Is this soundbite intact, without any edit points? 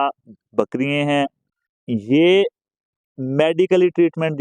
no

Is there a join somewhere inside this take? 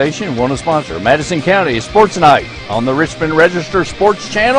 no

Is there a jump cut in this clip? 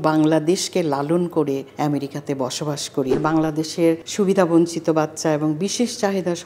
yes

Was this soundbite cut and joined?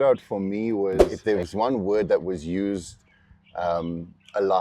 yes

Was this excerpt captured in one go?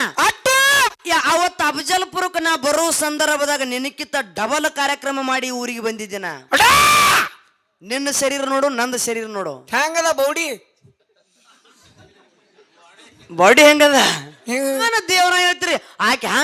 no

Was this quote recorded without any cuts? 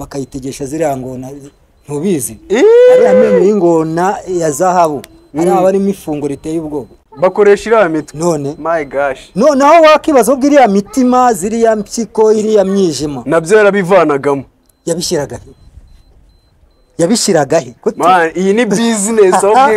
yes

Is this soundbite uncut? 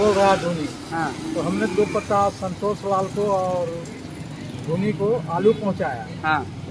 yes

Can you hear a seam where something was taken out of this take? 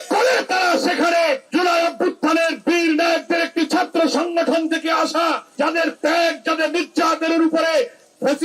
yes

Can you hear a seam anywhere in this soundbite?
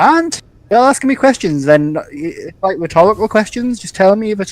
no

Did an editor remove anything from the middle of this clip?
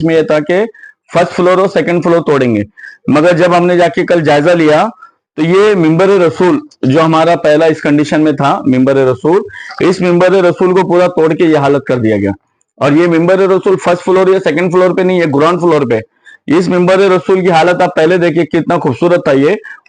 no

